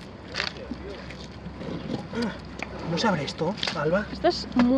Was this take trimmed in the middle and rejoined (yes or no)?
no